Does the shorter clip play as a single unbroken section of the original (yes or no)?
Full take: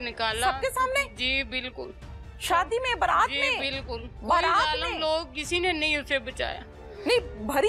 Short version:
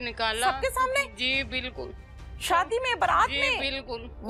yes